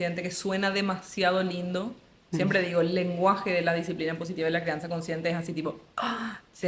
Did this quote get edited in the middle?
no; 0 cuts

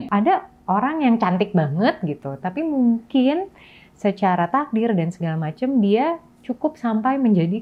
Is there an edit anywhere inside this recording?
no; 0 cuts

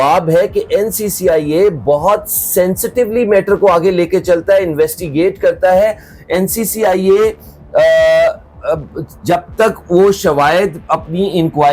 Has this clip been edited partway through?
no; 0 cuts

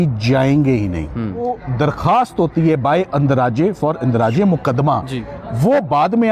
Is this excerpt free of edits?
no; 1 cut; at 1.4 s

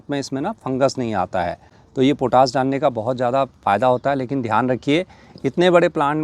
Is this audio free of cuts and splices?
yes; 0 cuts

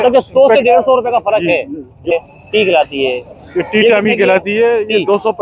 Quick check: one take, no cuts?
no; 1 cut; at 2.1 s

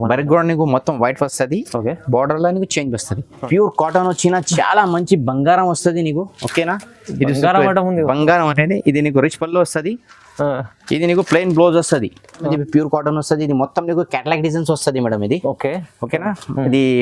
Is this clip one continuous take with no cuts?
no; 2 cuts; at 3.4 s, 12.5 s

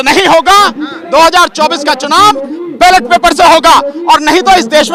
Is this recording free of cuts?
yes; 0 cuts

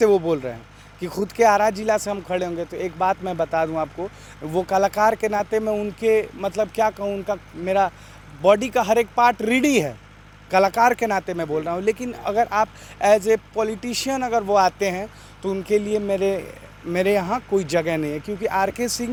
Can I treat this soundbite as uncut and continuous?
yes; 0 cuts

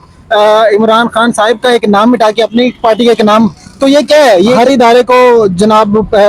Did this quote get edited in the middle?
yes; 1 cut; at 4.6 s

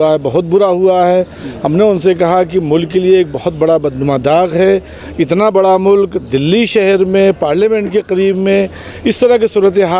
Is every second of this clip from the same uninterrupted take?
yes; 0 cuts

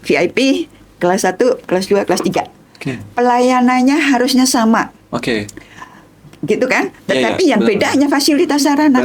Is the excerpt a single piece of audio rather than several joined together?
yes; 0 cuts

